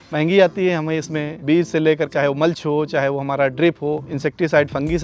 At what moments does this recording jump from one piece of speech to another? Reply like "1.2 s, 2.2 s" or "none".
1.3 s, 2.1 s, 4.1 s